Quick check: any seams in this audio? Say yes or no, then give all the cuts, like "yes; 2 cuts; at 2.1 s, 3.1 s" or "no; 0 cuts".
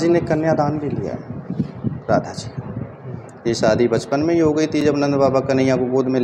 no; 0 cuts